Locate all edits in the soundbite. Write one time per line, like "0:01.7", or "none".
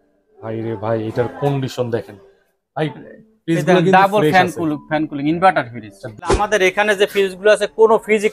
0:06.3